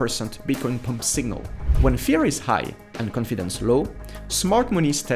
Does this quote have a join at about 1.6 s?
yes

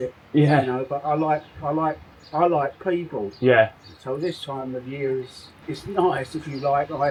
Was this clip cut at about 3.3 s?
no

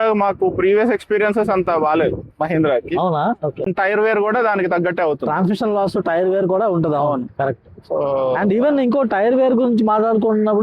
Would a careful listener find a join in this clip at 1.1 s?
no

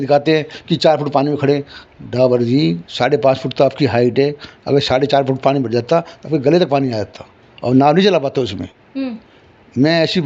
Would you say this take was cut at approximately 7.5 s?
no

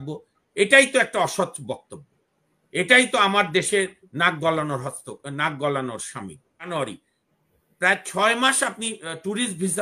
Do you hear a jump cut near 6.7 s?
yes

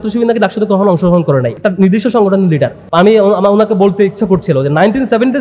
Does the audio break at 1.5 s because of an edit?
yes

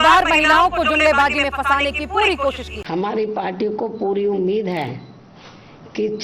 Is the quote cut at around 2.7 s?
yes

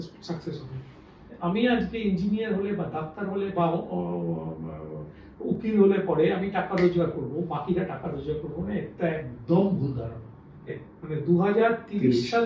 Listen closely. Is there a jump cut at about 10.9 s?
yes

